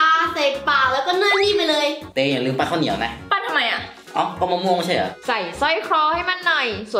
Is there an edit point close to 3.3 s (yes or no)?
no